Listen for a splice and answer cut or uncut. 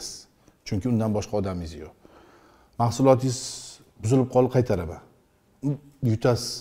uncut